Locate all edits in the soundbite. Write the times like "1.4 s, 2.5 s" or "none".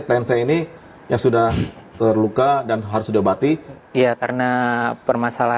3.9 s